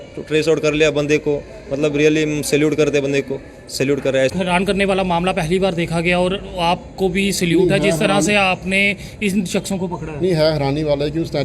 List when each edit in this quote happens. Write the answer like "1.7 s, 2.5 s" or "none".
4.3 s